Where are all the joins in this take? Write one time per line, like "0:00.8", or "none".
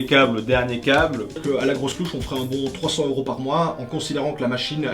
0:01.4